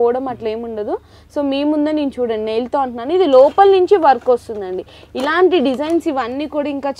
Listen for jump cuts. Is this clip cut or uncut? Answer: uncut